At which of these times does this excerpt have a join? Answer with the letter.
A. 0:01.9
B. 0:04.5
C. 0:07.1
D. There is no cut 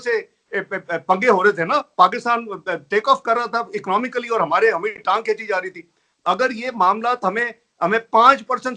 D